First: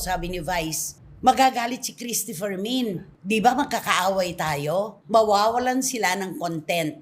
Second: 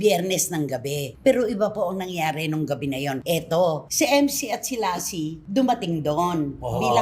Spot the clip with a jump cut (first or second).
second